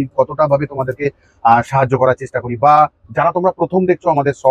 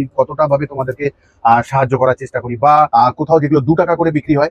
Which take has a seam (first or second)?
second